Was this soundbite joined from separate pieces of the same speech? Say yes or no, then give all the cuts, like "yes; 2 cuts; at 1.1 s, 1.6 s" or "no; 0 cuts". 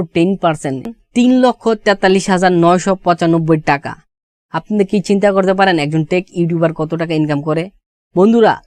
yes; 1 cut; at 0.9 s